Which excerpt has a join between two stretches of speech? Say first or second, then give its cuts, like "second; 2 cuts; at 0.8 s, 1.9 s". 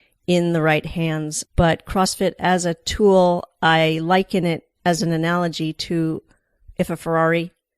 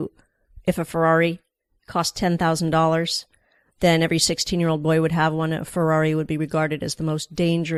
first; 1 cut; at 1.4 s